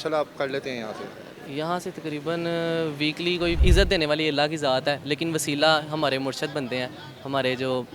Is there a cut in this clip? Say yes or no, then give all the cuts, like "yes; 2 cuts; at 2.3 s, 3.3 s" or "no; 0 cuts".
yes; 1 cut; at 3.6 s